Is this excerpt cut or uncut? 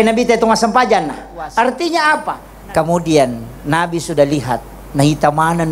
cut